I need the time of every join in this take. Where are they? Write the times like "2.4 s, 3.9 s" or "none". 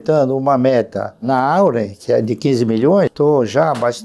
3.1 s